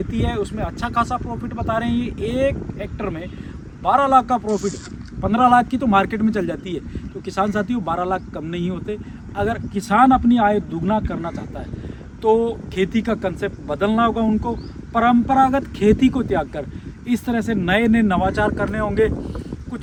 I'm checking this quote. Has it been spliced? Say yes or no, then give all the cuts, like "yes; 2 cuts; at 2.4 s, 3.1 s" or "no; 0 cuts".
no; 0 cuts